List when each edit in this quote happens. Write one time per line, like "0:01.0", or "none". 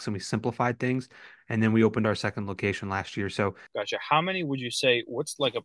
0:03.6